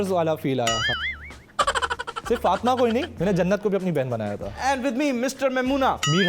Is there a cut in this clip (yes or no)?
yes